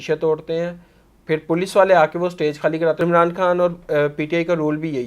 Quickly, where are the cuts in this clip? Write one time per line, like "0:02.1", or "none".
0:03.0